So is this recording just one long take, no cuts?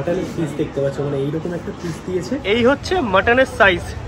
no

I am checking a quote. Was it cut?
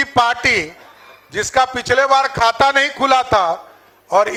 no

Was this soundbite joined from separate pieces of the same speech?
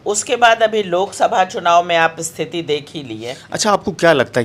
yes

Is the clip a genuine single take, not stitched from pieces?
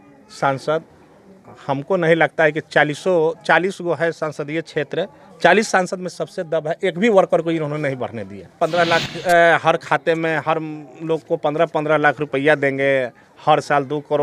no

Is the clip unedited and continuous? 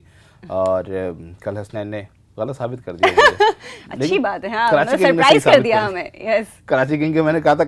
yes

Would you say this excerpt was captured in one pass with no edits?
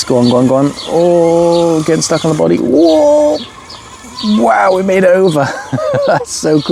yes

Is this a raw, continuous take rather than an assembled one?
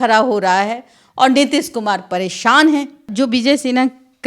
no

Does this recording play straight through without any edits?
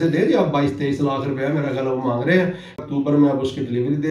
no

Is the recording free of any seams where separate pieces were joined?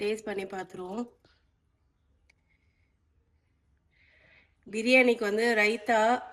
yes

